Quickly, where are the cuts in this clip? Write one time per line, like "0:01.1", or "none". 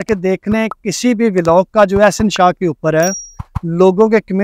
none